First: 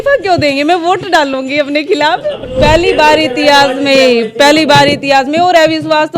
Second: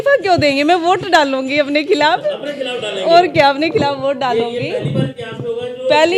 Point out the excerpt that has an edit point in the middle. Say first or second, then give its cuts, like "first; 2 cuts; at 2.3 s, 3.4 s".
first; 1 cut; at 2.4 s